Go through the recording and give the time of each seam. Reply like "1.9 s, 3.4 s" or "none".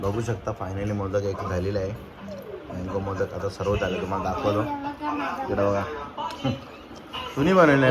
none